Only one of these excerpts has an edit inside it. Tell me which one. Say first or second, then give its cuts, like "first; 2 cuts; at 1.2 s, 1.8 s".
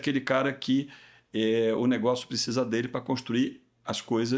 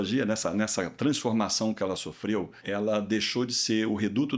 second; 2 cuts; at 0.9 s, 2.6 s